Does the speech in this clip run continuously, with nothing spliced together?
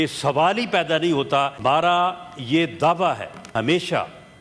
no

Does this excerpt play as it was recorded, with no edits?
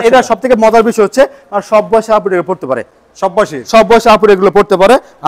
yes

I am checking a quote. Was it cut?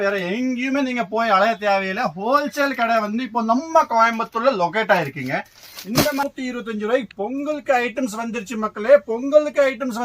yes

